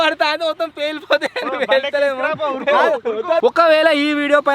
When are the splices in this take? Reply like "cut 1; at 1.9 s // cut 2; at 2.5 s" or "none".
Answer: cut 1; at 3.4 s